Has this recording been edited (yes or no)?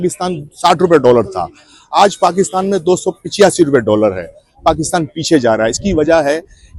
no